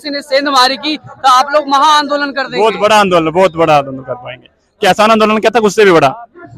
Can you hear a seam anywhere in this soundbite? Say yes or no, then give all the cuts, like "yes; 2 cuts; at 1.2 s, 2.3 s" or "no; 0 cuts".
no; 0 cuts